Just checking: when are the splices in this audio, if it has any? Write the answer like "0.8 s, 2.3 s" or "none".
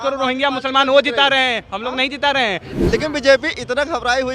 2.7 s